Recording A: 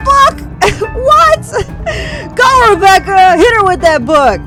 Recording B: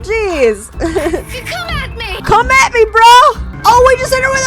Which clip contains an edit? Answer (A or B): B